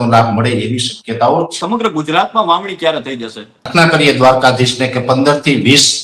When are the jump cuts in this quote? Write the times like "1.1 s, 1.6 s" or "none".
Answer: 1.6 s, 3.7 s